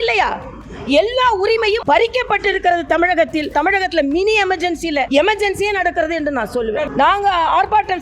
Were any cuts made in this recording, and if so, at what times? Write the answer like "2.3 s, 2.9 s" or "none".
1.8 s, 3.5 s, 5.1 s, 6.9 s